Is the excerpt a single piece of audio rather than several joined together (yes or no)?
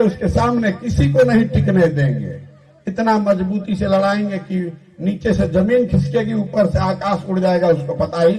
yes